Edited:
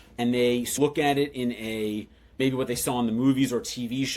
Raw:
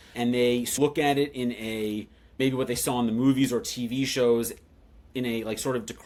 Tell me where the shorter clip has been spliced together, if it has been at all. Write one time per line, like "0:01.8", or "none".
none